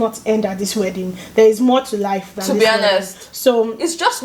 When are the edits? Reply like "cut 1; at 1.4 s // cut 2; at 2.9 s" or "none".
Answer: none